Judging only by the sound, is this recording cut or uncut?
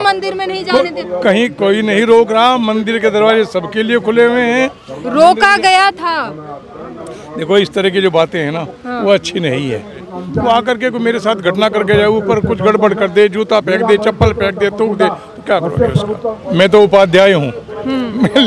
cut